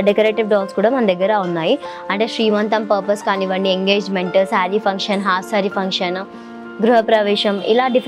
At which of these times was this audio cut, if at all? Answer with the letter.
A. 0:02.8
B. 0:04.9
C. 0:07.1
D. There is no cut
D